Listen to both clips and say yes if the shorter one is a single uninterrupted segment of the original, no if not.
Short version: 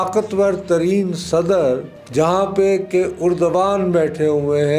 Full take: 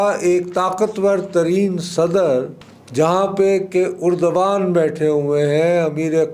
no